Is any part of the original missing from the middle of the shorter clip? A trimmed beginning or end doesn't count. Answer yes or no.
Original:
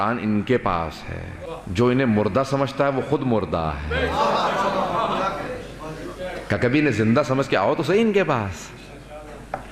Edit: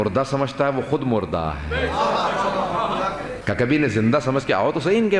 yes